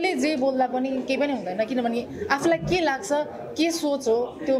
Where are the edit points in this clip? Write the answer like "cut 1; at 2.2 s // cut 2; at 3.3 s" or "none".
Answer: none